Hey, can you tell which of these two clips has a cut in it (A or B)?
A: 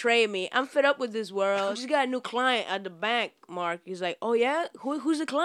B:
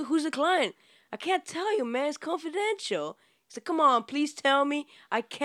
A